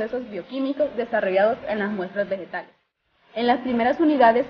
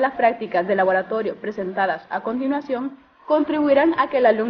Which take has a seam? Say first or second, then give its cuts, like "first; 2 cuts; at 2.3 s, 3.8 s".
first; 1 cut; at 2.1 s